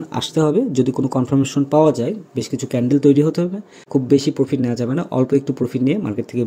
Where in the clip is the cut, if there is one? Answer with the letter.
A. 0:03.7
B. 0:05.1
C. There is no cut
A